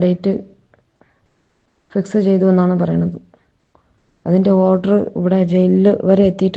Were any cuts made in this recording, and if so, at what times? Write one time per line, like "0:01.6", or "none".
0:05.3